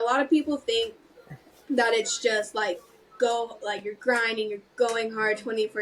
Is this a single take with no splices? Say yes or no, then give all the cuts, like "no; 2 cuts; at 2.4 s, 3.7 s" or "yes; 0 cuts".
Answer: yes; 0 cuts